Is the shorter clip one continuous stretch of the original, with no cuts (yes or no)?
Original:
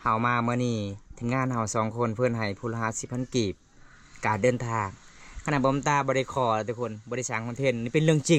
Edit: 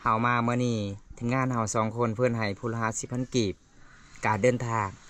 yes